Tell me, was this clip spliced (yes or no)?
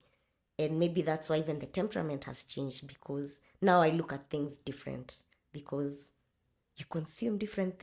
no